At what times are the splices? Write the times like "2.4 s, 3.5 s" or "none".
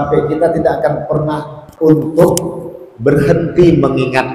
1.6 s